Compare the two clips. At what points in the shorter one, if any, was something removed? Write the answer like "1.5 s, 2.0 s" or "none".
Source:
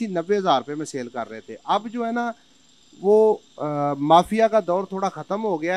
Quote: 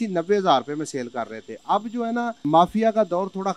2.4 s